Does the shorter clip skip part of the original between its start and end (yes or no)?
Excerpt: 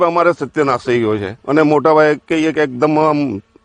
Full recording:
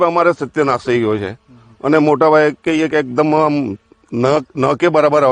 yes